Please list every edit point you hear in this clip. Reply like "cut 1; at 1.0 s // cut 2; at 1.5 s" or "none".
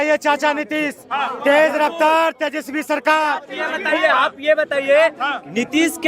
cut 1; at 3.5 s